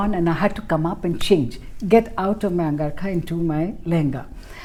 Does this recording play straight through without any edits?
yes; 0 cuts

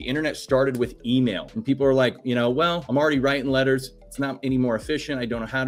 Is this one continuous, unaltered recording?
no; 2 cuts; at 1.5 s, 2.8 s

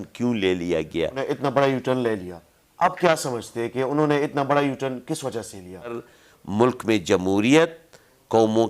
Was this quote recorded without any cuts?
no; 2 cuts; at 1.2 s, 6.0 s

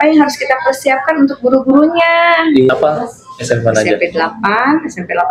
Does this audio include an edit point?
yes; 1 cut; at 2.7 s

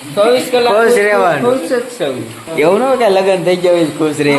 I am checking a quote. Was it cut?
yes; 1 cut; at 2.4 s

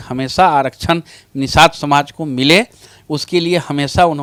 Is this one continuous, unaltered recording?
yes; 0 cuts

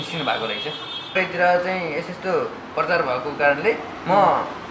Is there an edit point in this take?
yes; 1 cut; at 1.2 s

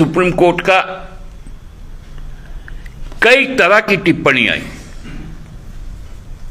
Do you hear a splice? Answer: no; 0 cuts

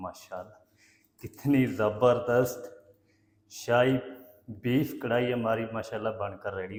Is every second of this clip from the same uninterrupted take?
yes; 0 cuts

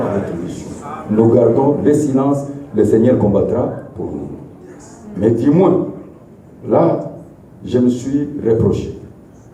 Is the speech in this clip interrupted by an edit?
no; 0 cuts

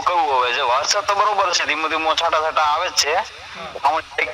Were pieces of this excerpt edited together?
no; 0 cuts

